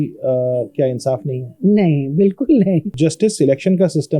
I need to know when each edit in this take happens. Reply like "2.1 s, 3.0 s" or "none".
2.9 s